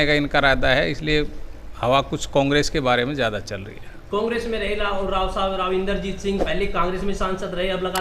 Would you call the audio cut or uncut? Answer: uncut